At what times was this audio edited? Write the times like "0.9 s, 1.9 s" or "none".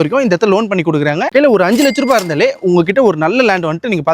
1.3 s